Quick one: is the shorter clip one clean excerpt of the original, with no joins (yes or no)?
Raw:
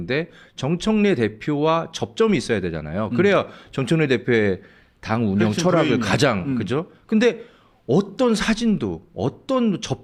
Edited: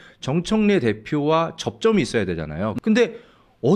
no